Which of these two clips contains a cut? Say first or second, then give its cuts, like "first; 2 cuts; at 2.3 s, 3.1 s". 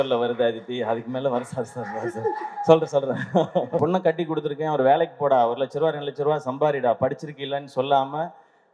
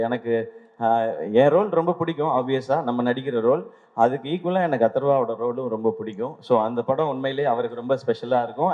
first; 1 cut; at 3.8 s